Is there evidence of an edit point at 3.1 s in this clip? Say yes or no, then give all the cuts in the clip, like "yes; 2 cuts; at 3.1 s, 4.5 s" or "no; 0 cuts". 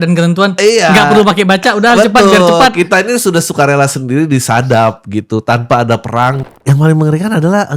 no; 1 cut; at 6.4 s